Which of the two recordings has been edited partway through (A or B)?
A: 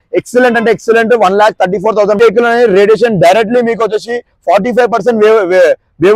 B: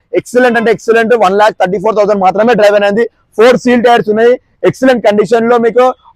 A